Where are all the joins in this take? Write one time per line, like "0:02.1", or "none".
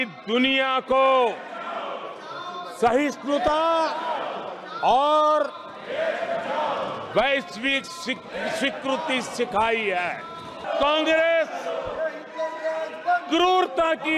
0:10.7